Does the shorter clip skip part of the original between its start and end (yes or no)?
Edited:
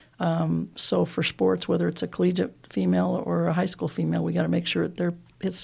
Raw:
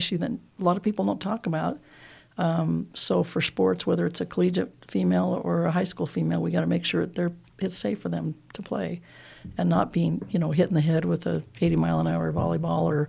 no